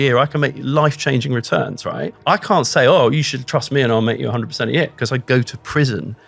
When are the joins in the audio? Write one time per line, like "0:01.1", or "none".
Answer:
0:02.1